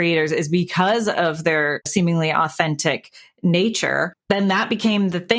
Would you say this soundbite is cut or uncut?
cut